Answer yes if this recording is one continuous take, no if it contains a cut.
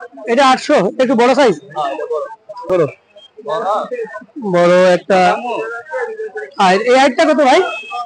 no